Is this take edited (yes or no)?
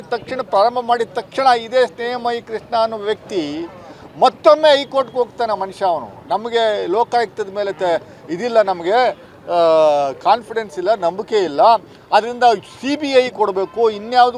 no